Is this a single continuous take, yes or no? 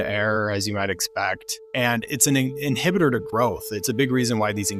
no